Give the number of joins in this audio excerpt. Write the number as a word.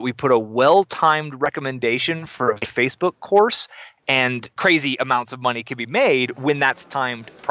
two